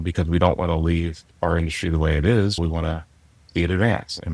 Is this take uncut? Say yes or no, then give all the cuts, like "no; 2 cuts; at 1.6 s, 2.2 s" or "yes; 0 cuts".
no; 1 cut; at 2.6 s